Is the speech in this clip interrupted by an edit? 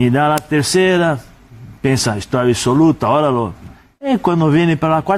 no; 0 cuts

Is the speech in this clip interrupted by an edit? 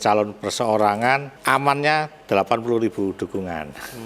yes; 1 cut; at 1.3 s

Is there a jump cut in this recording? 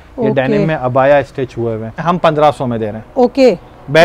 yes; 1 cut; at 2.0 s

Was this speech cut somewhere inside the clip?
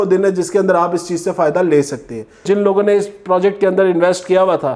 yes; 1 cut; at 2.4 s

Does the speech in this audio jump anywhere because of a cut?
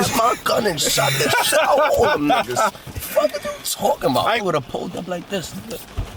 yes; 1 cut; at 4.4 s

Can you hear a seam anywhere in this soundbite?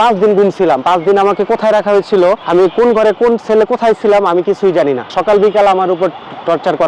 yes; 2 cuts; at 2.4 s, 5.1 s

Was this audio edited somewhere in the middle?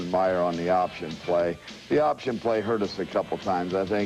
yes; 1 cut; at 2.6 s

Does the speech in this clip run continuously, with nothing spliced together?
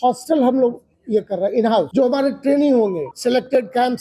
no; 2 cuts; at 1.9 s, 3.1 s

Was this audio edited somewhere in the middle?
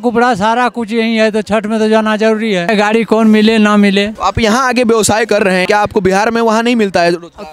yes; 3 cuts; at 2.7 s, 4.1 s, 5.6 s

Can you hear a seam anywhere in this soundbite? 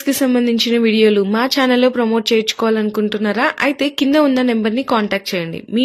no; 0 cuts

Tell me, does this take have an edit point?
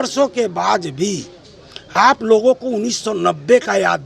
no; 0 cuts

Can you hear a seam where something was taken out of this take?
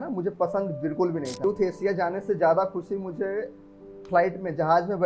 yes; 1 cut; at 1.4 s

